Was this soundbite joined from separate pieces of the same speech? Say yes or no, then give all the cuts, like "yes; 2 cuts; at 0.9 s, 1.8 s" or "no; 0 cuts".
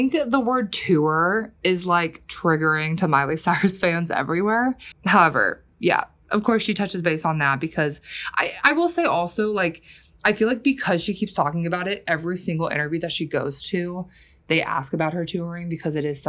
no; 0 cuts